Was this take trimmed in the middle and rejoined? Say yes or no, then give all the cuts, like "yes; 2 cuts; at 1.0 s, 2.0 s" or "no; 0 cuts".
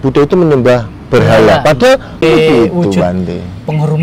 yes; 1 cut; at 2.2 s